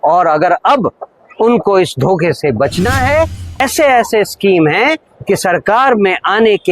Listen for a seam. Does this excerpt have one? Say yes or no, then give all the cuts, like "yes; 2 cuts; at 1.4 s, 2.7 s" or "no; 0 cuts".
yes; 1 cut; at 3.6 s